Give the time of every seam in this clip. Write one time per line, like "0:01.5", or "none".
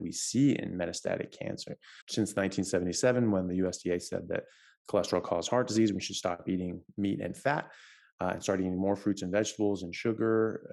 0:01.9